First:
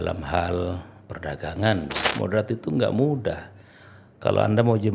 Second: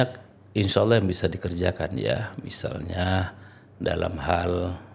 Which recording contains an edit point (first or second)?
first